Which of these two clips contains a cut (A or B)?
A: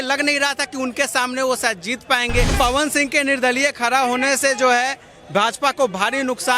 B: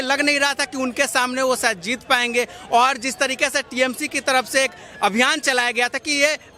A